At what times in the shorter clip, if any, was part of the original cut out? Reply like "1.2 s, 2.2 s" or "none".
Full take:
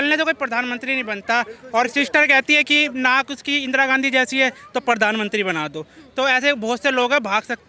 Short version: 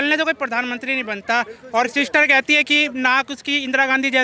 none